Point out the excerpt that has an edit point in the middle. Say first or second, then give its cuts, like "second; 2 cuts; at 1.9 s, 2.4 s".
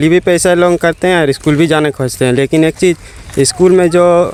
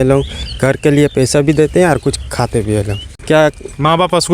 second; 1 cut; at 3.1 s